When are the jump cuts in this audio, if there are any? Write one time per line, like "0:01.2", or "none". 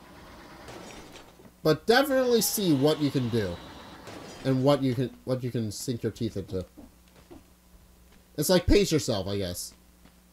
0:01.4